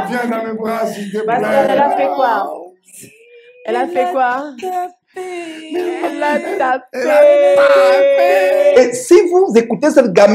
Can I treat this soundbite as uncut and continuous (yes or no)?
no